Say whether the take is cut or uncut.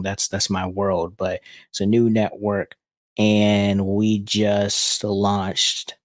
uncut